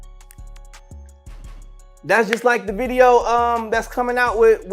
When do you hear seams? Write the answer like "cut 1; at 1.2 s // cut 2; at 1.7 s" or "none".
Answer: cut 1; at 2.0 s

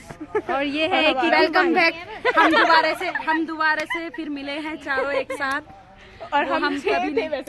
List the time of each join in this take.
none

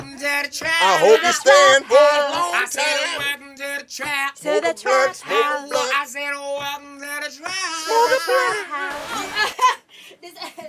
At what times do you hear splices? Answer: cut 1; at 9.3 s

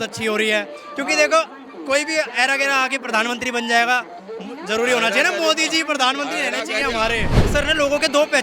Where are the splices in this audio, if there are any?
cut 1; at 7.4 s

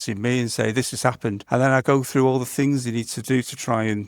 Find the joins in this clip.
cut 1; at 1.4 s

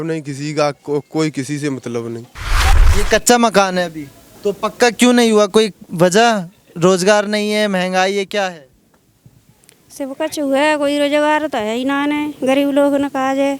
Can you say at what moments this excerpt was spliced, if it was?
cut 1; at 2.7 s

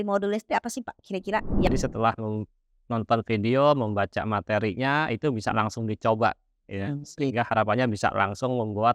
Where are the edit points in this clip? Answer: cut 1; at 1.7 s

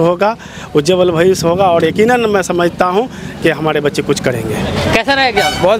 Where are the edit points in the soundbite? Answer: cut 1; at 4.8 s

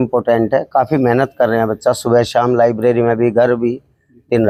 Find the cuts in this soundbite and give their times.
none

